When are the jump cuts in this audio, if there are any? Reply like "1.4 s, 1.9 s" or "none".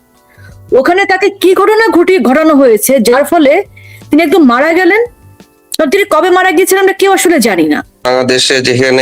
8.0 s